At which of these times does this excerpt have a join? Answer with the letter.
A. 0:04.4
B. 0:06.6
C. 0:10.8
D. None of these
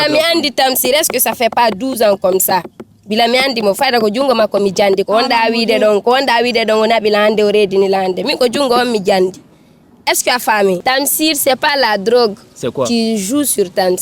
C